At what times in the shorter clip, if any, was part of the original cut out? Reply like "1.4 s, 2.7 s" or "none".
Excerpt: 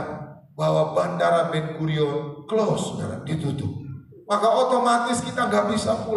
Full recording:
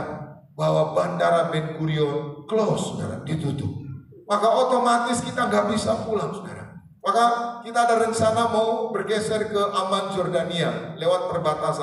none